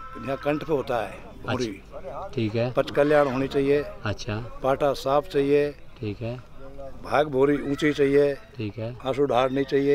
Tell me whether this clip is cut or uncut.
uncut